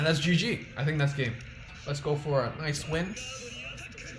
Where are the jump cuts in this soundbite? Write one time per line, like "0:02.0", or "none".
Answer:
0:01.7